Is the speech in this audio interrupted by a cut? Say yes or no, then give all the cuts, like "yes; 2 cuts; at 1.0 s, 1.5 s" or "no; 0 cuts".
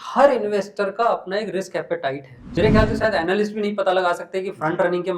yes; 1 cut; at 2.4 s